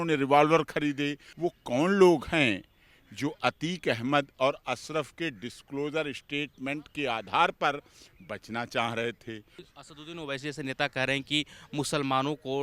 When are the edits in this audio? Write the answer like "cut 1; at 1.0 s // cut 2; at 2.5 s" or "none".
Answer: cut 1; at 1.3 s // cut 2; at 9.6 s